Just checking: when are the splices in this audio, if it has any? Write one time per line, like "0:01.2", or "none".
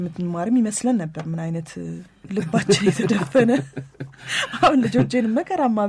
0:02.2